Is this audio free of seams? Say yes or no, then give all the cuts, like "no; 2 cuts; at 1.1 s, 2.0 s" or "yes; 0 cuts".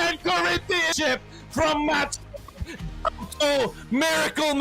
no; 1 cut; at 0.9 s